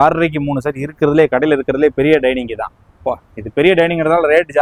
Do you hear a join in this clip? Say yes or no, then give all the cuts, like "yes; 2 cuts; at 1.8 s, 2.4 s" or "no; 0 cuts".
no; 0 cuts